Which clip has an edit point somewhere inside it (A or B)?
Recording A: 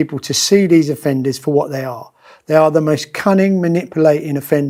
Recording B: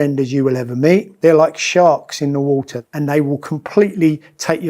B